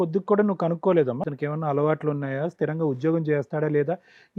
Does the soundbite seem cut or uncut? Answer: cut